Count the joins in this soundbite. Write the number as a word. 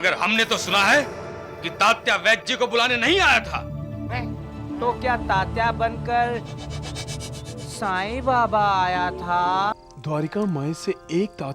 one